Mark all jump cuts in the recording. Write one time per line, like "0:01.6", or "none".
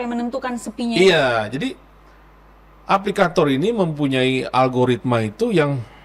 none